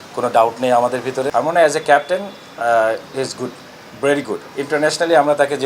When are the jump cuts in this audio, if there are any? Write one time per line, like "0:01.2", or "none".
0:01.3
0:04.5

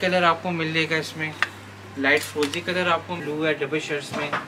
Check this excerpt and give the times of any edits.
0:03.2

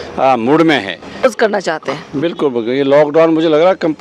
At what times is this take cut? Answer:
0:01.3

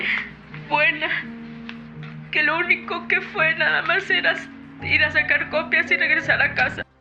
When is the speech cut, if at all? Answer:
none

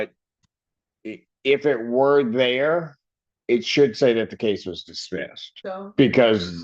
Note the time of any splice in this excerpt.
0:05.4

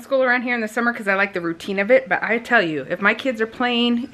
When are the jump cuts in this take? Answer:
none

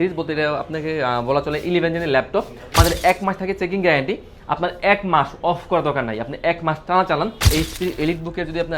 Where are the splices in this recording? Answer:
0:02.8
0:07.5

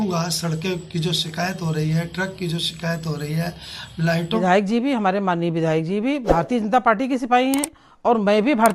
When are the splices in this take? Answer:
0:04.4

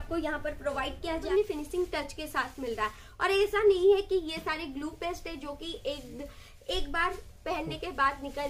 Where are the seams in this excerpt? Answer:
0:01.2

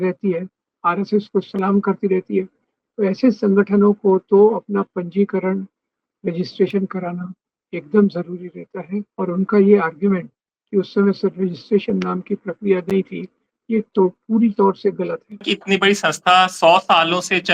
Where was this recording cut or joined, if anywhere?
0:09.1
0:15.5

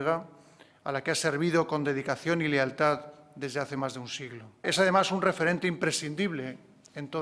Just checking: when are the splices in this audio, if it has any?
0:04.7

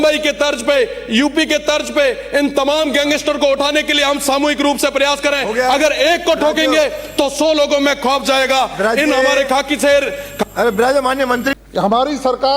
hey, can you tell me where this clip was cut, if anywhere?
0:11.5

